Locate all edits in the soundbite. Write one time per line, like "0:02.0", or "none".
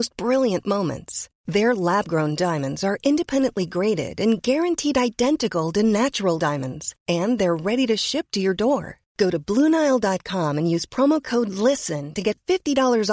none